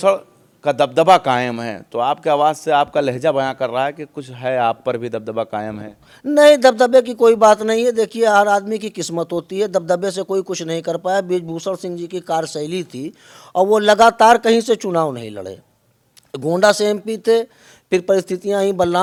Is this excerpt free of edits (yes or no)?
yes